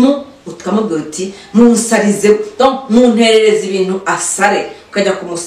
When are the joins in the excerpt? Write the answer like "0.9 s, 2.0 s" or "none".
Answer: none